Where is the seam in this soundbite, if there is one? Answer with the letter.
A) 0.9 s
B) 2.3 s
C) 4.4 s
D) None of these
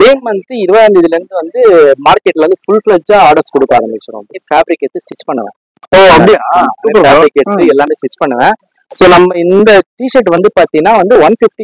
C